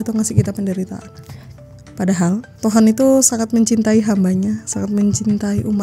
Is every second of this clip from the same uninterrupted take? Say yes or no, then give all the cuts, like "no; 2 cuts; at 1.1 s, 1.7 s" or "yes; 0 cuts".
no; 1 cut; at 2.5 s